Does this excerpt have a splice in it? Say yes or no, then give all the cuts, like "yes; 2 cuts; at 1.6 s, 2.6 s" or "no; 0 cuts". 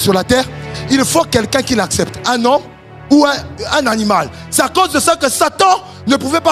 no; 0 cuts